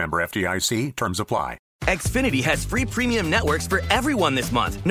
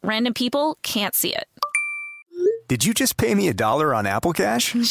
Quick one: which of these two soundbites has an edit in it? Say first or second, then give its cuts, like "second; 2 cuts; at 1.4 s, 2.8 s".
first; 1 cut; at 1.6 s